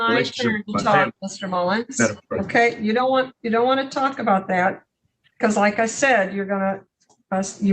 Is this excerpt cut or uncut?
uncut